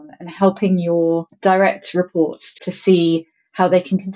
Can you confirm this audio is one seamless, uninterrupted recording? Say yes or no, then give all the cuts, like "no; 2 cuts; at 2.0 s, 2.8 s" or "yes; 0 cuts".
no; 2 cuts; at 1.3 s, 2.5 s